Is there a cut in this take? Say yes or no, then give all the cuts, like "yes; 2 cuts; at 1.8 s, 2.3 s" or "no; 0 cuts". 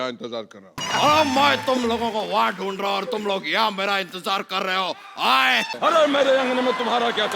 yes; 1 cut; at 5.7 s